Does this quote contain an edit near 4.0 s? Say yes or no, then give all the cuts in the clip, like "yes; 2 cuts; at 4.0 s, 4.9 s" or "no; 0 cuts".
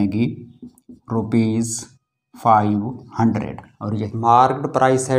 yes; 1 cut; at 4.0 s